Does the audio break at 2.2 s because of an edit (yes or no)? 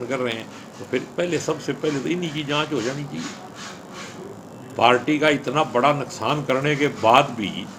no